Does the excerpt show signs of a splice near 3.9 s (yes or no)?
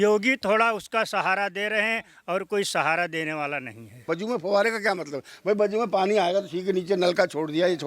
yes